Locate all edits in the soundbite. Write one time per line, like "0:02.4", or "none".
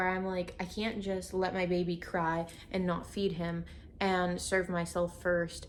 none